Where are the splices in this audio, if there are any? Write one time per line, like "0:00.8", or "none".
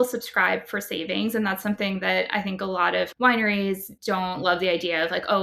0:03.9